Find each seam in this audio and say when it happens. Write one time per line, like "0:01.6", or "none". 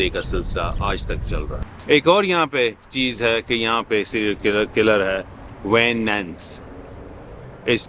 0:01.7